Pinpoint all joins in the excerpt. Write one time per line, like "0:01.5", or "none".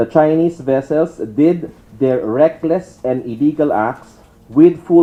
none